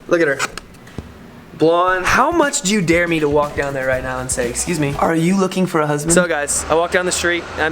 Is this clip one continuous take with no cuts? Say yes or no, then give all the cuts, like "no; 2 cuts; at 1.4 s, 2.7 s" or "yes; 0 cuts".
no; 2 cuts; at 2.1 s, 6.2 s